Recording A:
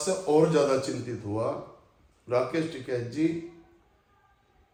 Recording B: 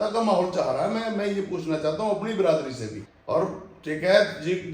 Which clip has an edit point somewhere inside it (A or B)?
B